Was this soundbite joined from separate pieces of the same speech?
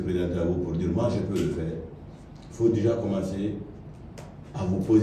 no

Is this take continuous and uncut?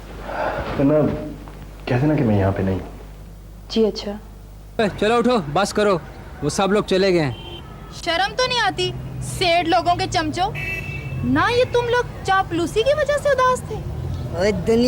no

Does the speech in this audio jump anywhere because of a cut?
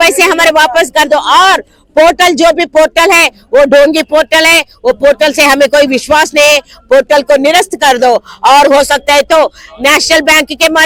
no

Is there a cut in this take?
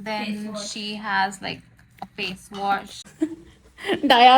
yes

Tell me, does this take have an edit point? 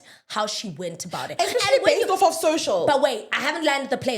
no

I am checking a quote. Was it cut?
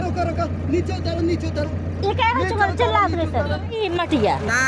yes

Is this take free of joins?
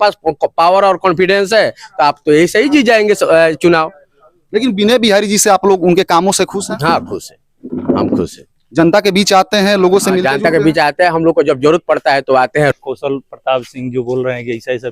no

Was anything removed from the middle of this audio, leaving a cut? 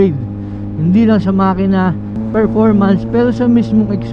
no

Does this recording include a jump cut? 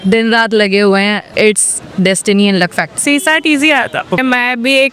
yes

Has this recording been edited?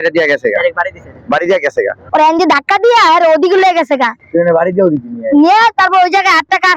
yes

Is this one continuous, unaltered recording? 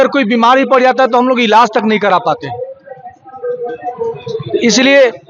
yes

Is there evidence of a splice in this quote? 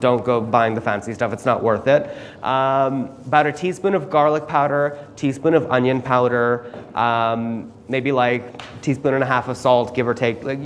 no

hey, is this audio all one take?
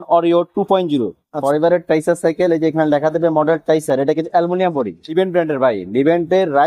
no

